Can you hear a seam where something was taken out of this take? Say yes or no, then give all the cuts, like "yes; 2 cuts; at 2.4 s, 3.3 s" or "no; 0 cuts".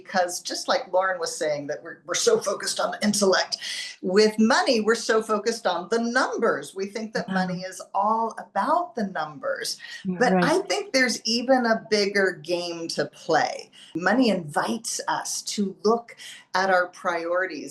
yes; 1 cut; at 14.0 s